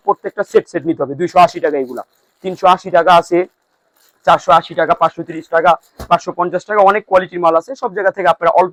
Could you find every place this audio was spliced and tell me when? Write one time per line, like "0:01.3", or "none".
none